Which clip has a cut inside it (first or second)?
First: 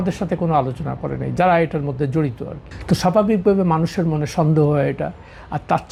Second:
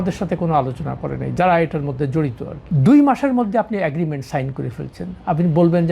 second